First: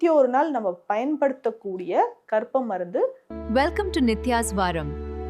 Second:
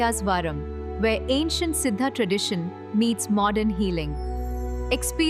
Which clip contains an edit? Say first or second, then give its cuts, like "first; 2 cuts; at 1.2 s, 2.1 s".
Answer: first; 1 cut; at 3.3 s